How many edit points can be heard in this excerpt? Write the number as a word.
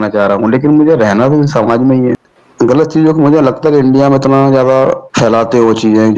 one